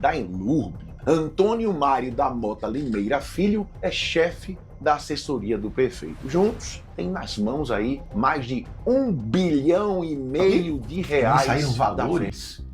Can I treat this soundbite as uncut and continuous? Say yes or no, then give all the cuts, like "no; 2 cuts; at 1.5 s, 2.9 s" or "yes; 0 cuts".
no; 1 cut; at 11.5 s